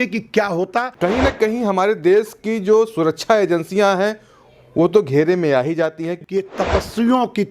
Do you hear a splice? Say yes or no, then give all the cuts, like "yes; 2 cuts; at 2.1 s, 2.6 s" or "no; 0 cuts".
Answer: yes; 2 cuts; at 0.9 s, 6.1 s